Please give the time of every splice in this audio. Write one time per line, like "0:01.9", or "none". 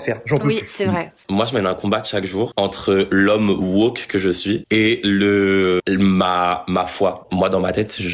0:01.1
0:02.5
0:04.6
0:05.8
0:07.2